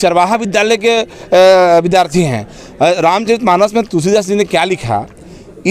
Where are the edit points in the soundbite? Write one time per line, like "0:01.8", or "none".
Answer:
none